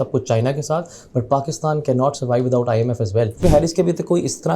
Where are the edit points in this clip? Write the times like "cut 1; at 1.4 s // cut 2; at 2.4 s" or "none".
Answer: cut 1; at 3.4 s